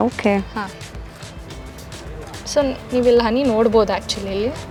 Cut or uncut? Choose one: uncut